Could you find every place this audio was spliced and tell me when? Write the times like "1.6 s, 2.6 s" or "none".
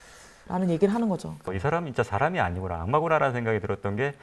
1.5 s